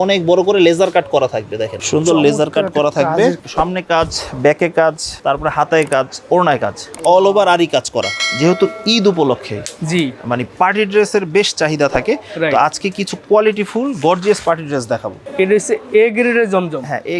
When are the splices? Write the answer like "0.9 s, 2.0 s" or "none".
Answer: 1.8 s, 3.4 s, 5.1 s, 8.2 s, 15.2 s